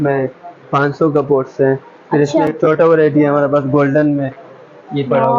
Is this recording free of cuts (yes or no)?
yes